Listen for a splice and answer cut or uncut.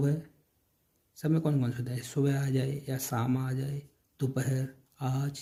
uncut